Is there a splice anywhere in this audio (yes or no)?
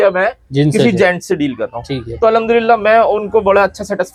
no